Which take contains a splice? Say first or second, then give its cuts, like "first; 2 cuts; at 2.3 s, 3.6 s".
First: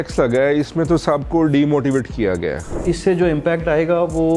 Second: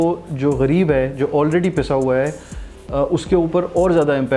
first; 1 cut; at 2.7 s